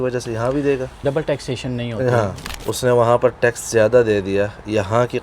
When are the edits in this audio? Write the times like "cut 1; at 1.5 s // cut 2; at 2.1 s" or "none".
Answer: cut 1; at 1.0 s // cut 2; at 2.4 s